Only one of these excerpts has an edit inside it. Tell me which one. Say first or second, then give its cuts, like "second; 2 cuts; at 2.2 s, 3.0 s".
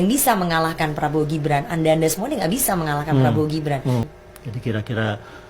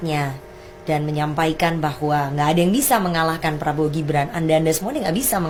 first; 1 cut; at 4.1 s